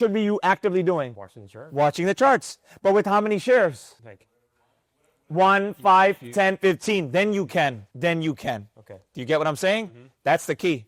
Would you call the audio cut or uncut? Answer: uncut